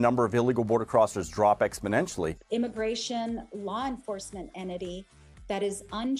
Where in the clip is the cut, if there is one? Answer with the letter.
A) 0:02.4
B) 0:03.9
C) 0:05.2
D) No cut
A